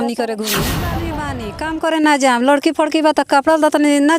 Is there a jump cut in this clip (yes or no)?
yes